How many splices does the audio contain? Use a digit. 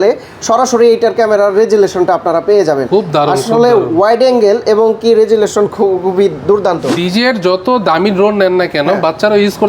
1